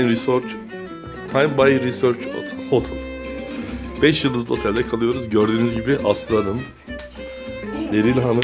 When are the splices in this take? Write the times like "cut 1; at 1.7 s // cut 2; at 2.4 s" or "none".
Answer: cut 1; at 6.7 s // cut 2; at 7.8 s

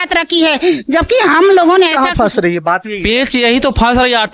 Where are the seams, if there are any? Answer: cut 1; at 2.0 s

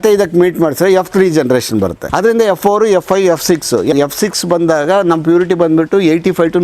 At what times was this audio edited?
cut 1; at 2.0 s // cut 2; at 3.9 s

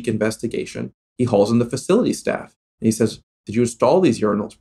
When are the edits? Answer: cut 1; at 1.0 s

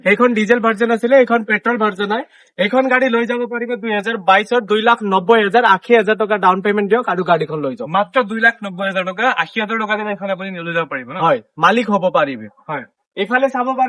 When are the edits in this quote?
none

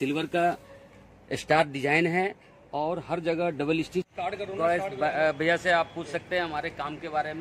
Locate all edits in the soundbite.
cut 1; at 4.1 s

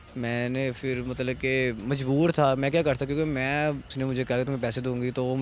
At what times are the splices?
cut 1; at 3.9 s

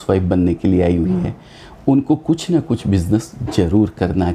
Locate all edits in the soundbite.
none

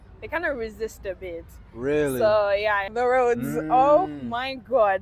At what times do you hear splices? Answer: cut 1; at 2.9 s

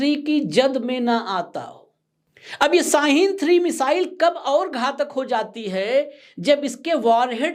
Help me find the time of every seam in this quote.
none

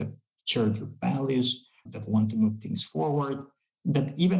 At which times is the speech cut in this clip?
cut 1; at 1.8 s

